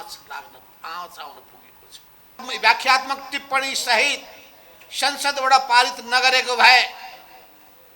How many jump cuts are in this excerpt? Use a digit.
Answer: 1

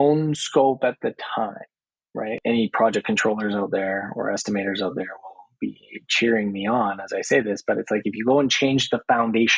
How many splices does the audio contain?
1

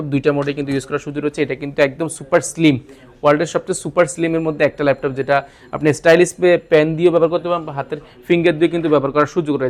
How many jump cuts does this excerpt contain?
0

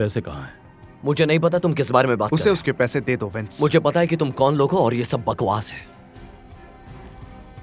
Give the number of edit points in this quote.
0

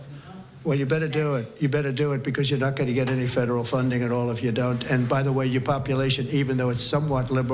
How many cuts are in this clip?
0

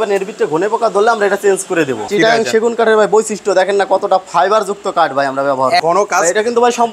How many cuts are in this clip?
2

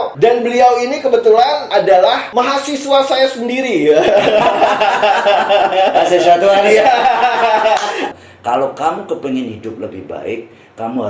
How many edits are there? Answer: 1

